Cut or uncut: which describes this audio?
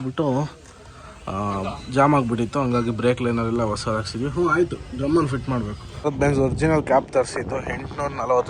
cut